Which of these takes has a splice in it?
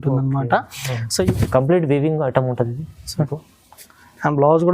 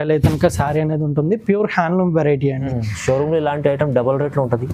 first; 1 cut; at 1.3 s

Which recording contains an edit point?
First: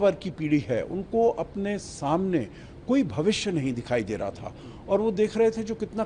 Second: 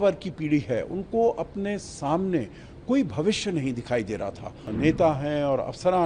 second; 1 cut; at 4.7 s

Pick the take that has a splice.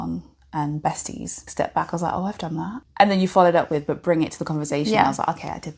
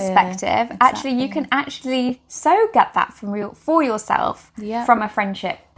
first; 2 cuts; at 1.4 s, 2.8 s

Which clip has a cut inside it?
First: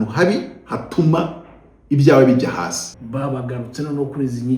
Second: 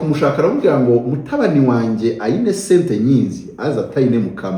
first; 1 cut; at 2.9 s

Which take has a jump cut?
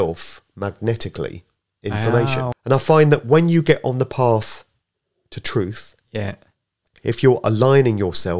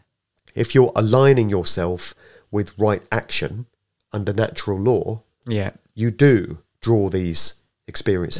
first; 1 cut; at 2.5 s

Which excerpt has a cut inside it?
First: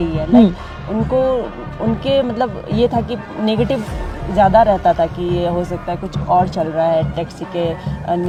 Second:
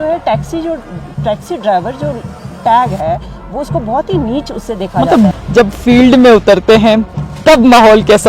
second; 1 cut; at 5.3 s

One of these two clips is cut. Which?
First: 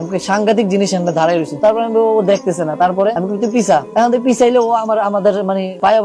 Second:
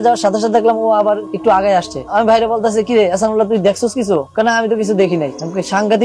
first; 2 cuts; at 1.5 s, 3.2 s

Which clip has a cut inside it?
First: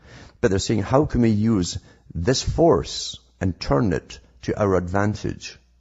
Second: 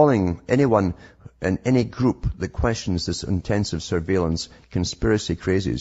second; 1 cut; at 4.5 s

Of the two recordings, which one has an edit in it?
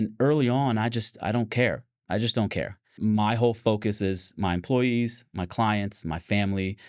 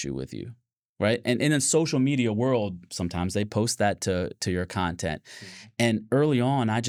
first; 1 cut; at 2.9 s

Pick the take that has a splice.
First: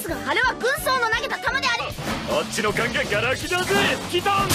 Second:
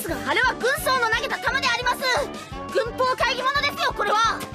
second; 1 cut; at 1.8 s

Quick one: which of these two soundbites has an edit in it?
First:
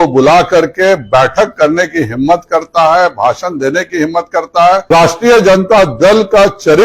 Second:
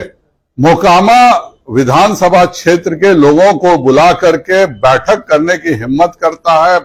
first; 1 cut; at 4.8 s

